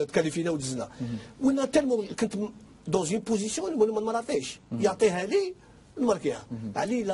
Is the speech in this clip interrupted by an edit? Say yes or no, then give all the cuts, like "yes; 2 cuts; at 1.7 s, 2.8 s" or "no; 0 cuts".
yes; 1 cut; at 1.1 s